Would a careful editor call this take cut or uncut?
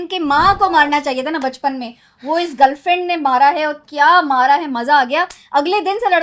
uncut